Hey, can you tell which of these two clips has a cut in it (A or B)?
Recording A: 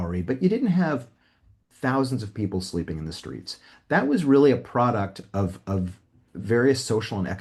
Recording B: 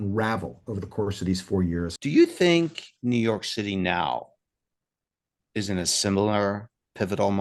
B